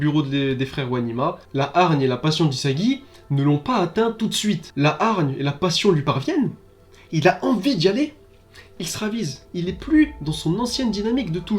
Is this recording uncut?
no; 3 cuts; at 1.4 s, 4.7 s, 9.4 s

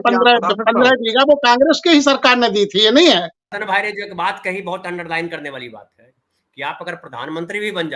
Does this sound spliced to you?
yes; 1 cut; at 3.5 s

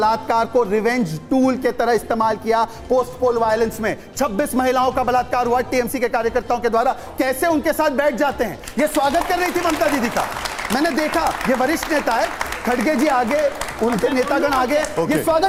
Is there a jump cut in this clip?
no; 0 cuts

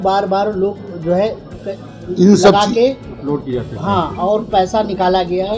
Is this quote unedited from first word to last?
yes; 0 cuts

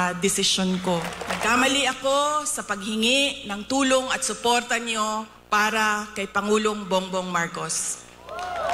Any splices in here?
yes; 1 cut; at 1.2 s

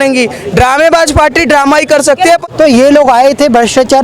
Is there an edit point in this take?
yes; 1 cut; at 2.4 s

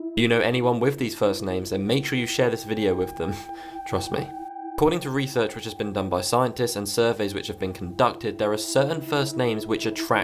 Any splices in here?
no; 0 cuts

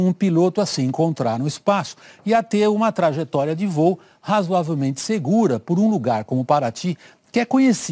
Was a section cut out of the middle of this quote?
yes; 1 cut; at 4.4 s

